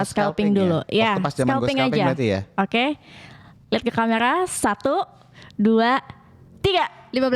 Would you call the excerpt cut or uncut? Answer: uncut